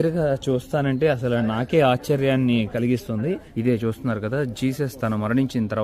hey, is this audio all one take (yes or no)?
no